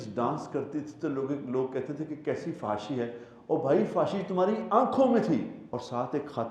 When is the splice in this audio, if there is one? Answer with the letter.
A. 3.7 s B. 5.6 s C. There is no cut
B